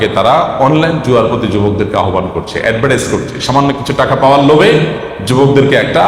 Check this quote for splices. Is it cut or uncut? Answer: uncut